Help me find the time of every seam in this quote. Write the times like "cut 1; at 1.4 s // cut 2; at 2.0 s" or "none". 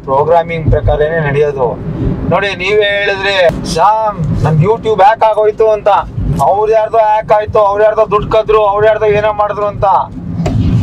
cut 1; at 3.5 s // cut 2; at 6.2 s